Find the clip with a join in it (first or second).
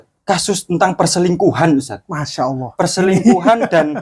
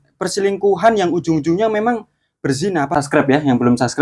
second